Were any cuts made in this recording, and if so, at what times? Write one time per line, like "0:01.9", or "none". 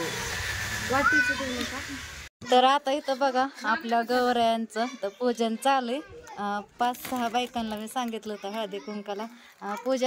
0:02.3

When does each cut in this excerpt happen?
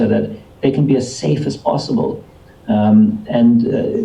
none

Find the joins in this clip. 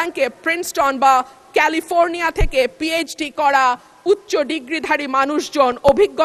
none

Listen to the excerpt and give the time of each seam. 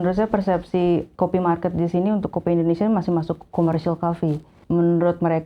0:01.1
0:04.5

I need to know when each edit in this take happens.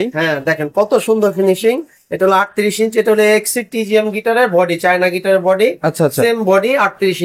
none

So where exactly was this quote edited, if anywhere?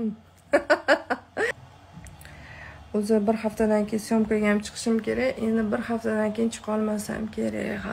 0:01.5

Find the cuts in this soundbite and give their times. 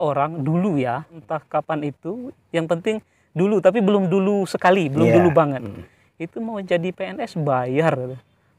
0:01.2

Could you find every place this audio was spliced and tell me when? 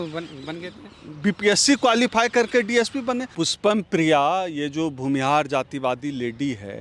0:03.3

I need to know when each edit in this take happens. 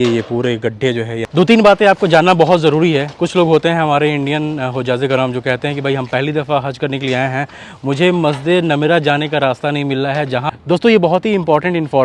0:01.2
0:10.5

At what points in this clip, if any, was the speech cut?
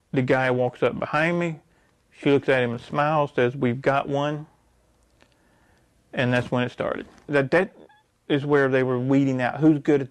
0:07.3

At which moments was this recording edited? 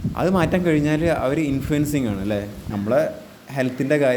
0:02.6

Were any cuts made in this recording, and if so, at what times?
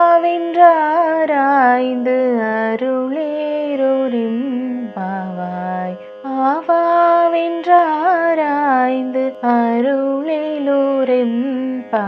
none

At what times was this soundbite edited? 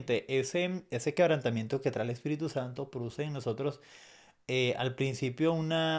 none

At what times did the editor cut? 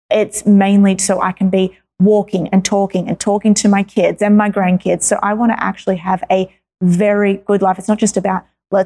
none

